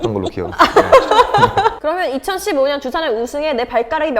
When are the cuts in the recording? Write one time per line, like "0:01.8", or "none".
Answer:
0:01.8